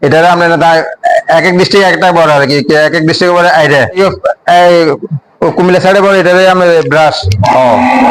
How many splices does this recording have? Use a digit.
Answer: 1